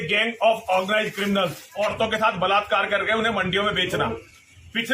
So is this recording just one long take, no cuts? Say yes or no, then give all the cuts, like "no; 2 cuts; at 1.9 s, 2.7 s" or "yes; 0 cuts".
no; 1 cut; at 1.6 s